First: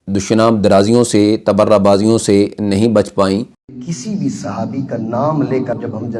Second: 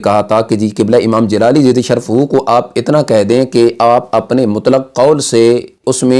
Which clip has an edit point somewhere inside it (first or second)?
first